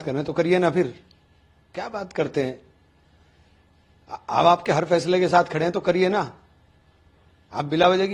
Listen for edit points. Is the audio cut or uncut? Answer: uncut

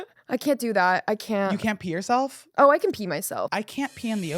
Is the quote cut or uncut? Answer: cut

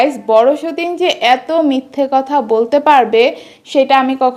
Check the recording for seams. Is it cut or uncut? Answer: uncut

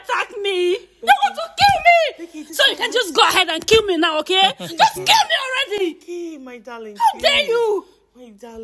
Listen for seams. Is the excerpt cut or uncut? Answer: uncut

